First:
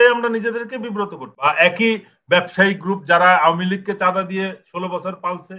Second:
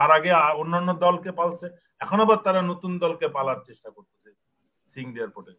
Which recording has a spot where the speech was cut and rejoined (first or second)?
first